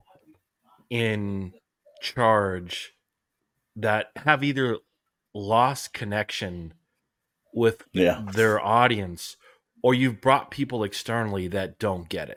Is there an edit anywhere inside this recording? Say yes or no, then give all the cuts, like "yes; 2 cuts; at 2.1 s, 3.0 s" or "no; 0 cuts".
no; 0 cuts